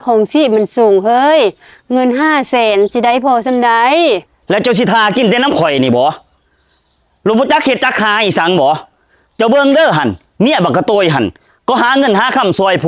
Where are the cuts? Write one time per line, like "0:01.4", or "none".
0:04.3